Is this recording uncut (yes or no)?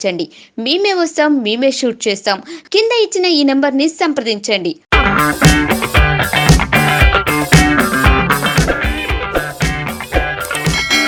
yes